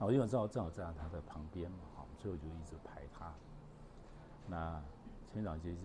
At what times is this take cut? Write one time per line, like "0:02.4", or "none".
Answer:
none

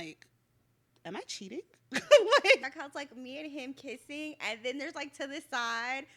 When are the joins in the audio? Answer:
0:02.6

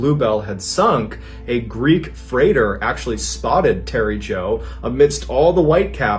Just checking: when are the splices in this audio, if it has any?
none

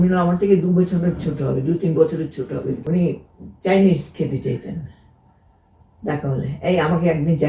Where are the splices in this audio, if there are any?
0:02.8

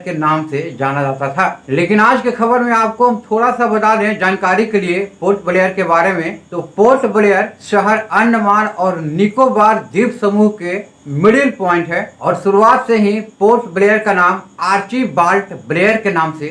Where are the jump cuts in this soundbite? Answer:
none

